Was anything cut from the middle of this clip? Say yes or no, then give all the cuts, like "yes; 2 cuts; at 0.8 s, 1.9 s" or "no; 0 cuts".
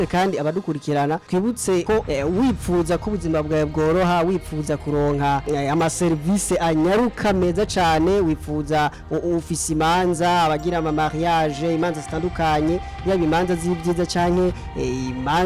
no; 0 cuts